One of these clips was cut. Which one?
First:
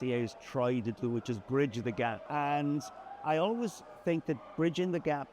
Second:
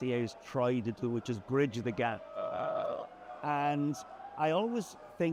first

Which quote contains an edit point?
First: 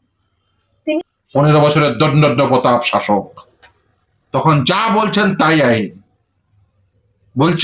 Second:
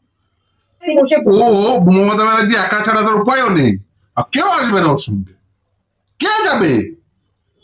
first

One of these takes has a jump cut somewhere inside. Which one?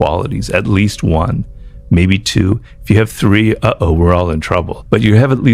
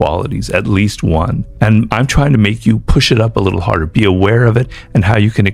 second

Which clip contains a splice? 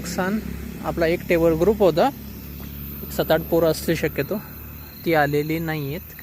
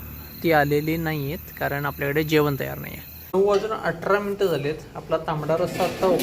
second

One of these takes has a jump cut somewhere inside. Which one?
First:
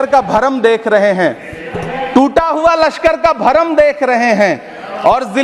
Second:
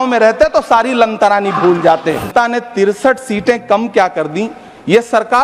second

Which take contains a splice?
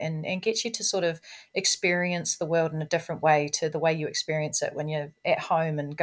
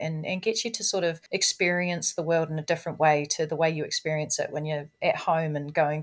second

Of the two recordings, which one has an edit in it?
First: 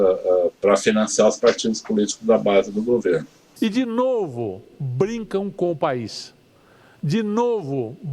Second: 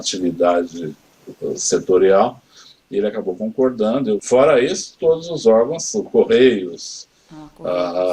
first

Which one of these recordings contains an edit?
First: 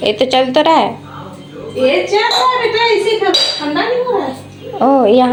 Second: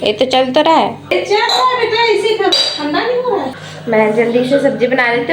second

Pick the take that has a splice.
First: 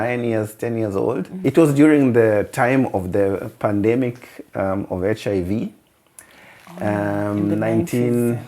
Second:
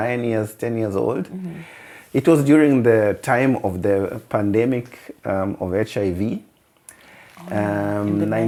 first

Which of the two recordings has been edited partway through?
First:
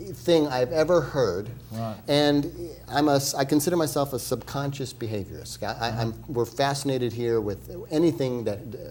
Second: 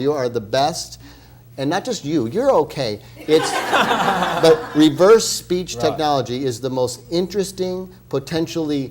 second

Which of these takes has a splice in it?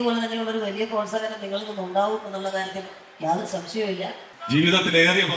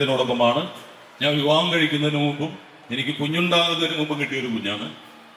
first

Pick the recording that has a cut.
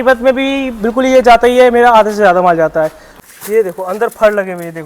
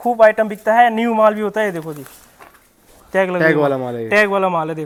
first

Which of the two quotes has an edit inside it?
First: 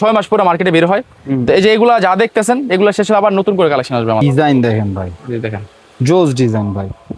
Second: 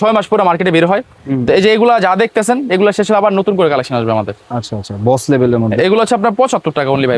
first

